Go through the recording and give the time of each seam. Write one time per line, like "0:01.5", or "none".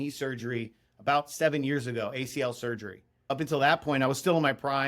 0:03.3